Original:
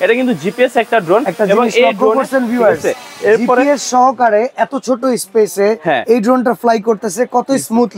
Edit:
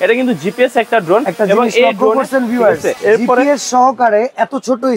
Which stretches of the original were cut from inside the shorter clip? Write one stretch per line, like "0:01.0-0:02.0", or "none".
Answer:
0:02.9-0:03.1